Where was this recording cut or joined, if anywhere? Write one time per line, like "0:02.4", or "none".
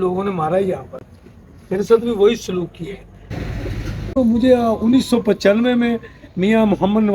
0:03.4